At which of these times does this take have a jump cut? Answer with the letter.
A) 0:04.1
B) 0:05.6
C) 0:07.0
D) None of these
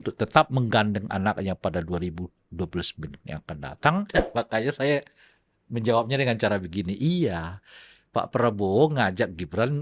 A